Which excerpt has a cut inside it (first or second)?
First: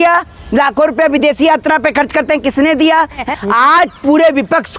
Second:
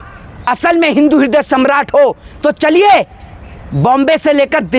first